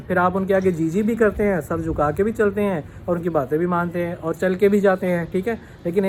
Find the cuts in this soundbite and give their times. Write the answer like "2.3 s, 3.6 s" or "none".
none